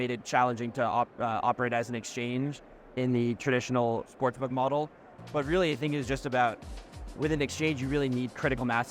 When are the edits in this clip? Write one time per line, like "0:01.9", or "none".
0:04.1